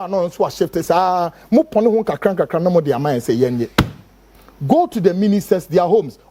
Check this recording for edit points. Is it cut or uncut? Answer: uncut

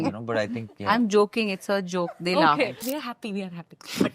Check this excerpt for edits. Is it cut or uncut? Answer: cut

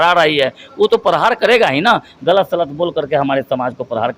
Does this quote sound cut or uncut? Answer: uncut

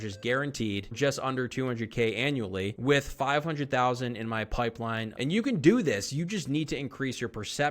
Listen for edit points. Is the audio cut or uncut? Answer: cut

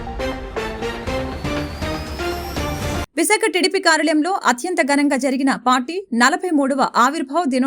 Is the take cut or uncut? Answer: cut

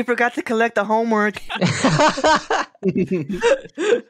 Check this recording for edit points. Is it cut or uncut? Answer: cut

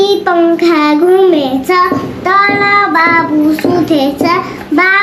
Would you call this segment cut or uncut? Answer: uncut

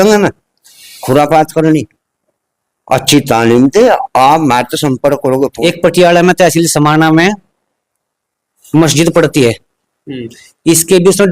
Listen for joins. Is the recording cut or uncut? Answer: cut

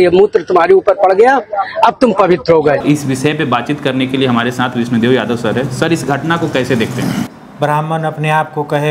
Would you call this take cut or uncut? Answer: uncut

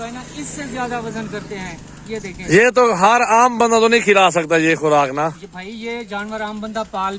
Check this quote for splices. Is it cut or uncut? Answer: uncut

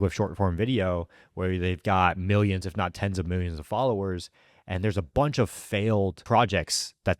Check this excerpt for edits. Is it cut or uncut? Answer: cut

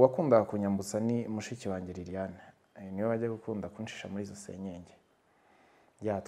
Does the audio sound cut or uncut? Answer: uncut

